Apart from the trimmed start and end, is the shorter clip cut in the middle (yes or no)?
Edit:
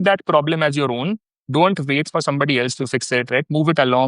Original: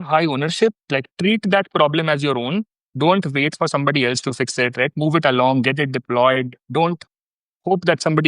no